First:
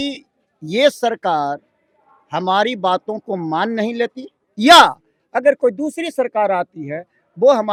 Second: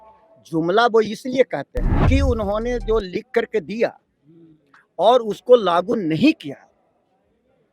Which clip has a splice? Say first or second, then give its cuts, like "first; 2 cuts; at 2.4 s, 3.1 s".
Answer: second; 1 cut; at 2.0 s